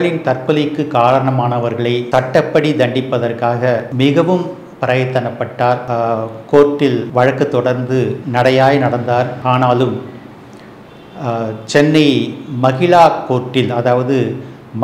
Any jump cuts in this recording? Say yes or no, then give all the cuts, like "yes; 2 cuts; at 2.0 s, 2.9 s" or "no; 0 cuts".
yes; 6 cuts; at 2.0 s, 3.9 s, 5.8 s, 7.1 s, 8.2 s, 9.3 s